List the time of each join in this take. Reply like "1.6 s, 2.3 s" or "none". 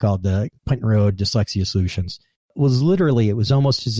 2.5 s